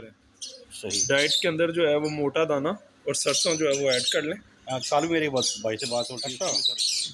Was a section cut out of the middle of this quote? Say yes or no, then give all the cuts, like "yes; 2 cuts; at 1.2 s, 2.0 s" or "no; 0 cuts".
yes; 1 cut; at 6.2 s